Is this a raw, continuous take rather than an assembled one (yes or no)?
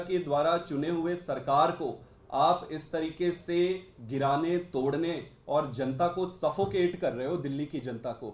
yes